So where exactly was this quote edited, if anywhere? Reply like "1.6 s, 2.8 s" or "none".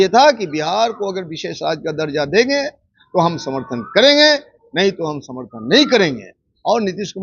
none

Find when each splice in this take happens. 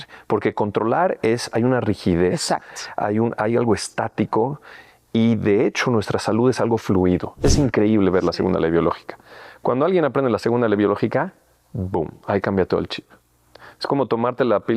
7.3 s

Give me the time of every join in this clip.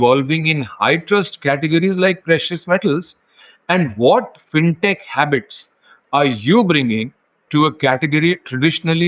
none

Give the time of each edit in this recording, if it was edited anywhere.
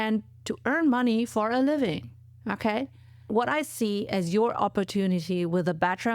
3.2 s

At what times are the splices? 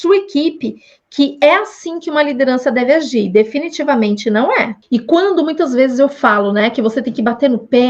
4.8 s

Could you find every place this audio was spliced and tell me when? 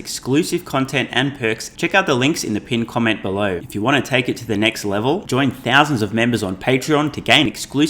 1.7 s, 3.6 s

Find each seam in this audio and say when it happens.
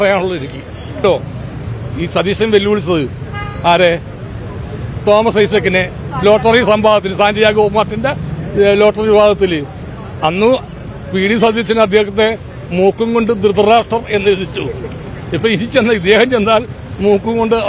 1.0 s

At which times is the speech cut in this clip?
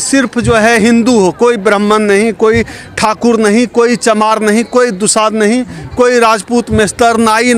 none

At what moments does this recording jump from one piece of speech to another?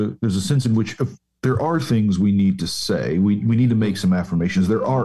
none

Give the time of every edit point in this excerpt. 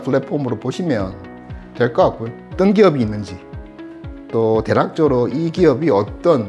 2.5 s

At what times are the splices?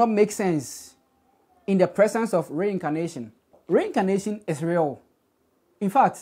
3.6 s

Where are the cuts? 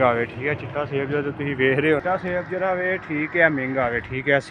2.0 s

